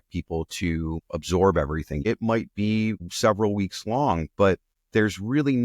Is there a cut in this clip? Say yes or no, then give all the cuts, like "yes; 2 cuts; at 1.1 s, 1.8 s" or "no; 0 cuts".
yes; 4 cuts; at 1.0 s, 1.9 s, 3.1 s, 4.7 s